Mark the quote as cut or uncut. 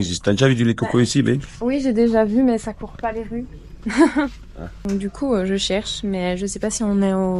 uncut